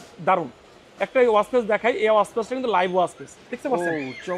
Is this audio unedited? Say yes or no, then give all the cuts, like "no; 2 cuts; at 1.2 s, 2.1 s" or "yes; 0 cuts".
yes; 0 cuts